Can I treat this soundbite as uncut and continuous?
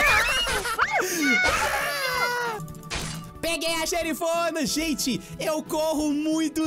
no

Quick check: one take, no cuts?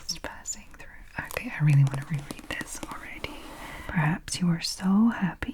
no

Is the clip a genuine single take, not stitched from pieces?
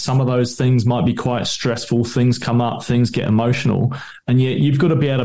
yes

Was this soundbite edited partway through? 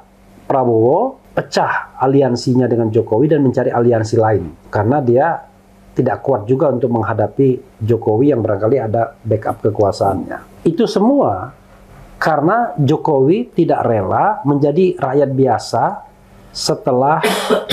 yes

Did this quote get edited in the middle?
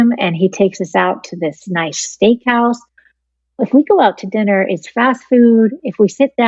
no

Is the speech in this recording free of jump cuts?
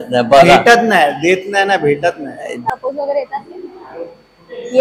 no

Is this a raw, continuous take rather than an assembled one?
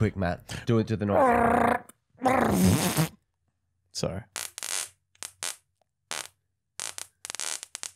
yes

